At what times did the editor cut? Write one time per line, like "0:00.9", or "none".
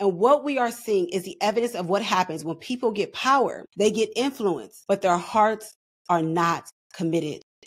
0:03.6
0:04.7